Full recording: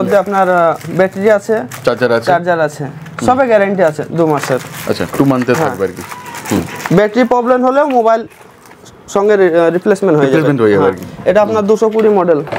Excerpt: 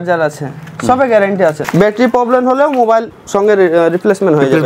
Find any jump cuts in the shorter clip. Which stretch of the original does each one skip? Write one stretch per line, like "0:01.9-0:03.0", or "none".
0:04.0-0:06.8
0:08.3-0:09.0